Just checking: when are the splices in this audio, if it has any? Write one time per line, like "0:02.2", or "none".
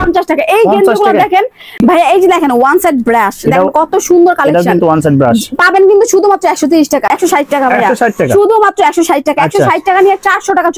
0:01.8
0:07.1